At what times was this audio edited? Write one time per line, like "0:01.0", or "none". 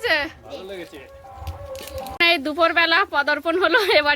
0:02.2